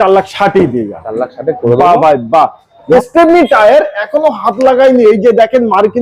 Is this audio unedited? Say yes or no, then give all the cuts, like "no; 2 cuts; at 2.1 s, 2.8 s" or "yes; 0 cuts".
no; 1 cut; at 2.8 s